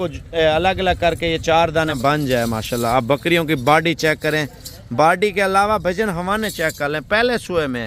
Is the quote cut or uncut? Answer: cut